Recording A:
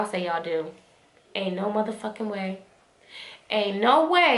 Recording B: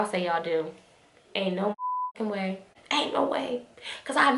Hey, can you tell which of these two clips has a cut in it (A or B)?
B